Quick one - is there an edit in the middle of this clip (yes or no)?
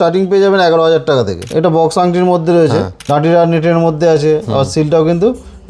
yes